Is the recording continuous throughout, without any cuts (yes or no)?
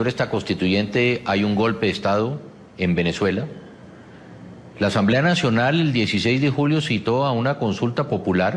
no